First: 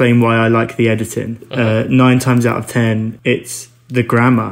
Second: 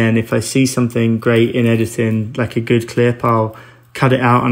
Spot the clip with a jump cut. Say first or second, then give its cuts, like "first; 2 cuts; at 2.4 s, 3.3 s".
first; 2 cuts; at 1.4 s, 3.1 s